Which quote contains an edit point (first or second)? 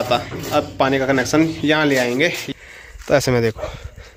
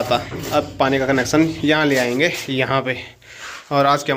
first